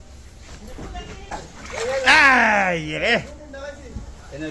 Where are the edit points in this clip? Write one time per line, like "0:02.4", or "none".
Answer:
0:01.3